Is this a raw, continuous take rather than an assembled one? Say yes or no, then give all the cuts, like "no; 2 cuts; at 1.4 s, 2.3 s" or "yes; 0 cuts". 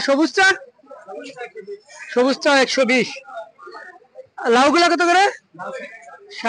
yes; 0 cuts